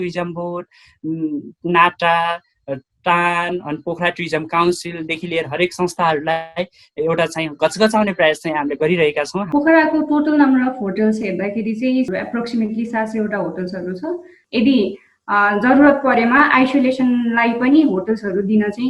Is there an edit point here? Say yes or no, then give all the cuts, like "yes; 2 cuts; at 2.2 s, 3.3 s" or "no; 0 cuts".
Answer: yes; 2 cuts; at 9.4 s, 14.4 s